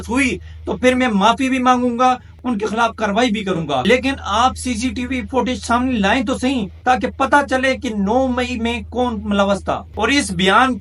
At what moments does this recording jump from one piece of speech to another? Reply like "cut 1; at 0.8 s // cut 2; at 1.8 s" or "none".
cut 1; at 2.3 s // cut 2; at 3.8 s // cut 3; at 9.9 s